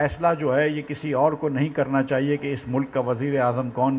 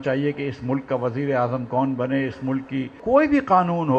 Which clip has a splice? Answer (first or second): second